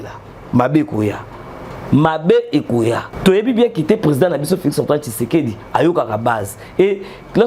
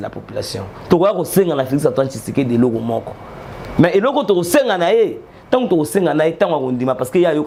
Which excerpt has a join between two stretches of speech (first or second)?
first